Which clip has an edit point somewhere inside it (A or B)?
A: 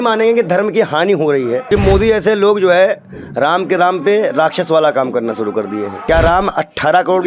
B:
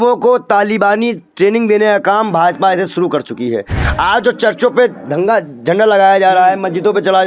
A